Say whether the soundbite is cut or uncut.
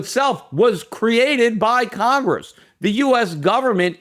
uncut